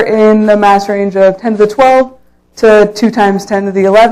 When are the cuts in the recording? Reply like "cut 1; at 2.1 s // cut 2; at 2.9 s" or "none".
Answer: none